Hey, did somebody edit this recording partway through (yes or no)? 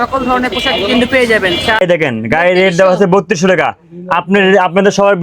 yes